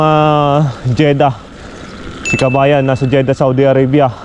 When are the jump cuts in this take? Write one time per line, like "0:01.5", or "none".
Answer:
none